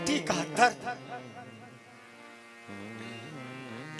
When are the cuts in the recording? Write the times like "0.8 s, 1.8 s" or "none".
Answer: none